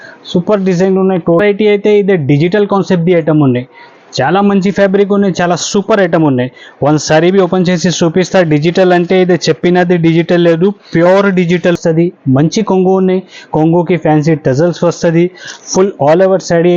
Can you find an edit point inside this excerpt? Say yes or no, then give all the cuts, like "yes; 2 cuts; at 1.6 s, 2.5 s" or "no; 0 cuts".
yes; 2 cuts; at 1.4 s, 11.8 s